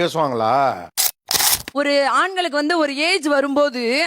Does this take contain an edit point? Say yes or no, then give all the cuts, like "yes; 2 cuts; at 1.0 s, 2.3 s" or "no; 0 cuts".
yes; 1 cut; at 1.5 s